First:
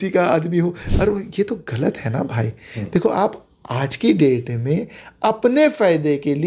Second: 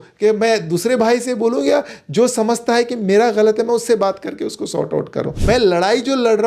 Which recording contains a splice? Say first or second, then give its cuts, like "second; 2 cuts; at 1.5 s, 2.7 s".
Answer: second; 1 cut; at 5.3 s